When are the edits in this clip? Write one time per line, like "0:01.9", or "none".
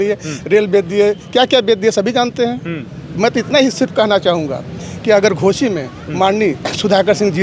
none